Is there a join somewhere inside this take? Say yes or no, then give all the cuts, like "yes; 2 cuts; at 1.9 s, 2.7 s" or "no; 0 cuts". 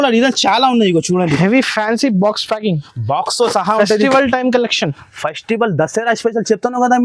no; 0 cuts